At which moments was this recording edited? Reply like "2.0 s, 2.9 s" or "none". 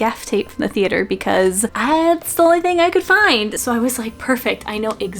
1.7 s, 3.6 s